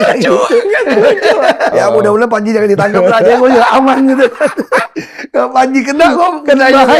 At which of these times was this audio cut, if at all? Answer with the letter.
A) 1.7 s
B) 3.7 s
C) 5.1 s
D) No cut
A